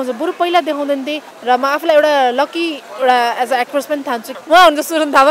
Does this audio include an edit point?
yes; 2 cuts; at 1.2 s, 4.3 s

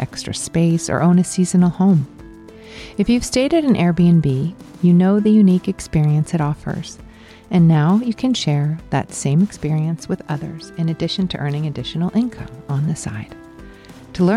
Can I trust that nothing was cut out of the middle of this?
yes; 0 cuts

